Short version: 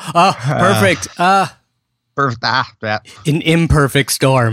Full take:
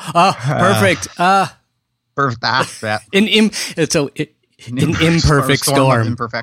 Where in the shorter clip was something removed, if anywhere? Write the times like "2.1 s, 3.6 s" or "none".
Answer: 3.0 s